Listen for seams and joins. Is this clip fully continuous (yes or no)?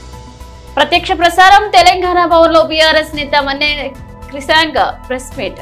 yes